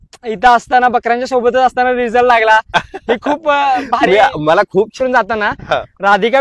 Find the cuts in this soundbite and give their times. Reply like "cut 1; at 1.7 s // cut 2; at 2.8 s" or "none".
cut 1; at 4.9 s